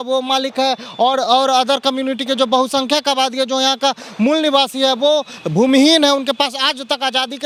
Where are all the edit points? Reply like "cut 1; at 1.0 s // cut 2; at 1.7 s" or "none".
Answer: none

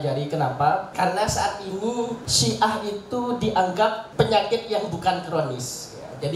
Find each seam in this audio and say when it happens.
cut 1; at 0.9 s // cut 2; at 2.3 s // cut 3; at 4.0 s

